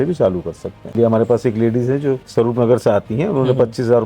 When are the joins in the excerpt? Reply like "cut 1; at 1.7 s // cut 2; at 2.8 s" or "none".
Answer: cut 1; at 0.9 s // cut 2; at 2.2 s

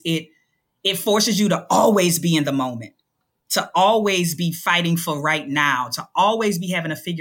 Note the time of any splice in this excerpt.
none

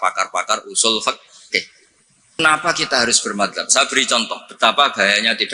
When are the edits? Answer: cut 1; at 2.4 s

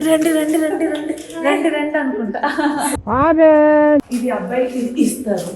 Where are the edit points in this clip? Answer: cut 1; at 4.1 s

